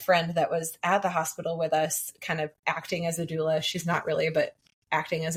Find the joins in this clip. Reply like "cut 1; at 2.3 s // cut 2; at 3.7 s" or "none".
none